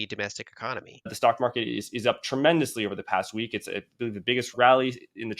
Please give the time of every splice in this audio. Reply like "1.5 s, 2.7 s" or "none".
1.1 s, 4.5 s